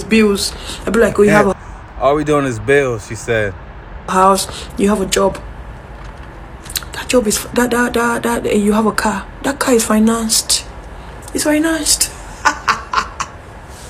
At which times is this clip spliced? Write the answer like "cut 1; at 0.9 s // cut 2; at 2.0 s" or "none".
none